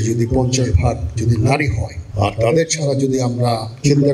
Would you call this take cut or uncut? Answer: uncut